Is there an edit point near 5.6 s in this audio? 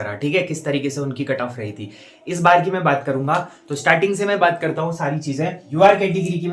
yes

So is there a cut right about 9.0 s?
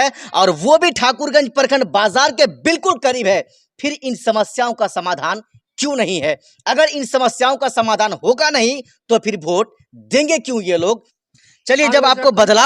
no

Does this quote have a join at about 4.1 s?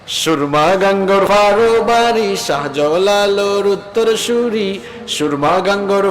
no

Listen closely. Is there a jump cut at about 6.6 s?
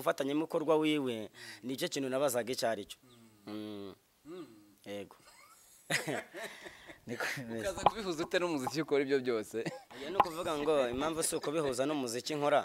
no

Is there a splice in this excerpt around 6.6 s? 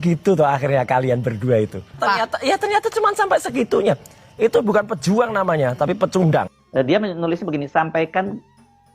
yes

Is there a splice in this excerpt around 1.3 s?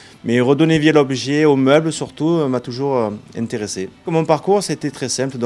yes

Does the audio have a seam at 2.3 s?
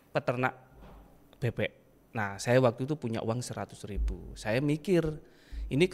no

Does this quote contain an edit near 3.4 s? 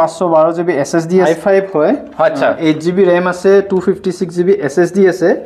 no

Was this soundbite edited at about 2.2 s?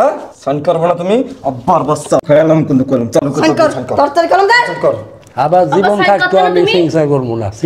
yes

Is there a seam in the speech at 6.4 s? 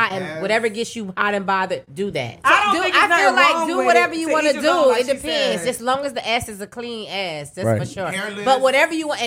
no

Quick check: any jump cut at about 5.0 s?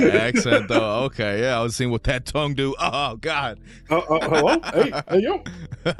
no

